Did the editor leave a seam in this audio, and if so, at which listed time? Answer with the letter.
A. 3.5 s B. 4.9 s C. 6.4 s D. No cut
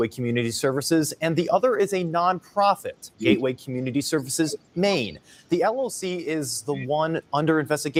D